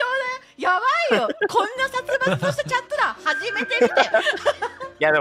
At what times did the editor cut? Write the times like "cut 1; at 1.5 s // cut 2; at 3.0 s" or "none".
none